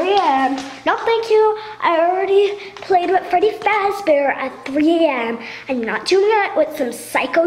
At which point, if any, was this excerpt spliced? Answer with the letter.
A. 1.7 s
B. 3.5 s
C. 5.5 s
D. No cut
C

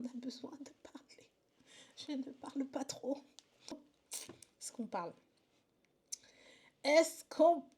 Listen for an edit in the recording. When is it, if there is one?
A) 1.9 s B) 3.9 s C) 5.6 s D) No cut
B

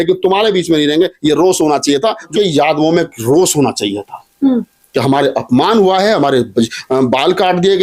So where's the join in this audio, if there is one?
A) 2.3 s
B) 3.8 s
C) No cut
A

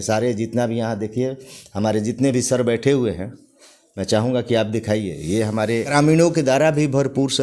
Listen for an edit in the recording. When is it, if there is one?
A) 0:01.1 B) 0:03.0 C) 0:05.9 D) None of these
C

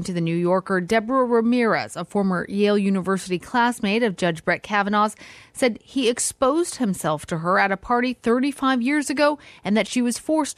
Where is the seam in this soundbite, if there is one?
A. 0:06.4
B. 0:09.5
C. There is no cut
C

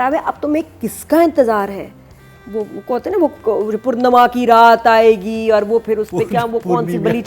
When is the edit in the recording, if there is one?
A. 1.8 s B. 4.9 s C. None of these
C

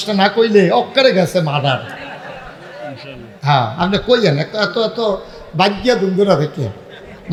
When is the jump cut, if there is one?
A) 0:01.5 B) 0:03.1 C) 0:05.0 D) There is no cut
D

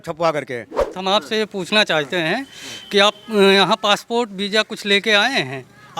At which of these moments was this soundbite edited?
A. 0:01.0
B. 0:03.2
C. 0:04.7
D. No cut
A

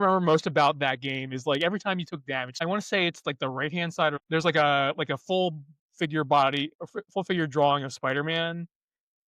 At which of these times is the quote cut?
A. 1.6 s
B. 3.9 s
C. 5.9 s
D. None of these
D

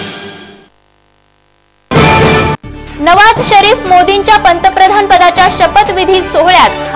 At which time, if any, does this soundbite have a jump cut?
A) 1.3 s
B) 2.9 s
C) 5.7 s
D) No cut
A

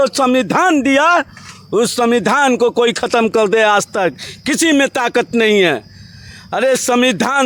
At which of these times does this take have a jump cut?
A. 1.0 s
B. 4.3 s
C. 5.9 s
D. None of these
D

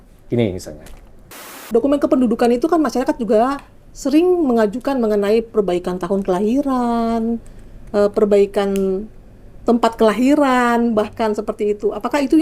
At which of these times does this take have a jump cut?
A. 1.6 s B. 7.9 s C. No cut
A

